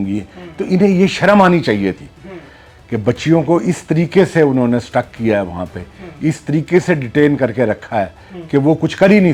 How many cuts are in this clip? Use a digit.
0